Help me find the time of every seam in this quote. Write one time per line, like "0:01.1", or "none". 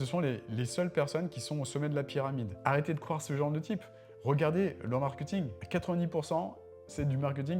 0:02.5
0:05.6